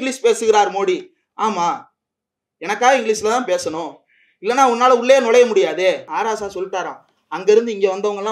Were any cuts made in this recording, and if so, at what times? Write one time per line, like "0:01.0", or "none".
0:06.1